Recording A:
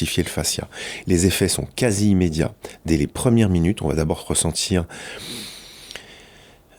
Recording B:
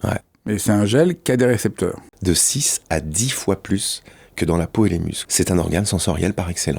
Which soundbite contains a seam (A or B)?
B